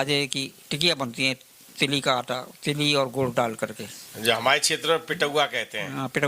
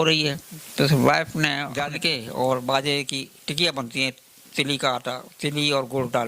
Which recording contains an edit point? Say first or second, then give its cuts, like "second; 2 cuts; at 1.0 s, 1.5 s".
second; 1 cut; at 1.7 s